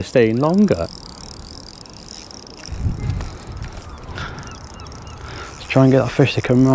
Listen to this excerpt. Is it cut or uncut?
uncut